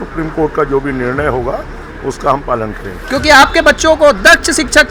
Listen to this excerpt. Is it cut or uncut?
cut